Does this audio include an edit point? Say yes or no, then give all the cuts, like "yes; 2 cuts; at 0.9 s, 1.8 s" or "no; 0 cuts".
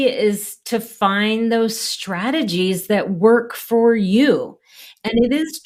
no; 0 cuts